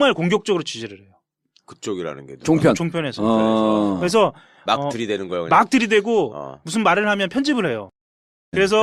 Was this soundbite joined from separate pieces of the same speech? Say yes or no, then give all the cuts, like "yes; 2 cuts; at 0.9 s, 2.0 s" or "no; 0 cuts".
no; 0 cuts